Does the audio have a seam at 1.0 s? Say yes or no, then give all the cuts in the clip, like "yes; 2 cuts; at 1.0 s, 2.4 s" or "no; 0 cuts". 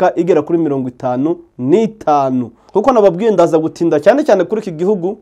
no; 1 cut; at 2.7 s